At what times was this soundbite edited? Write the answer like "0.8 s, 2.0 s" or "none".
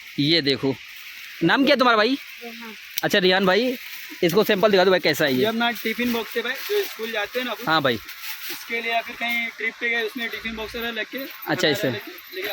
none